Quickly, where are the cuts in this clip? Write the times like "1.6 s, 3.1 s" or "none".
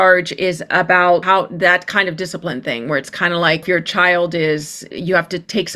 1.2 s, 3.6 s, 4.8 s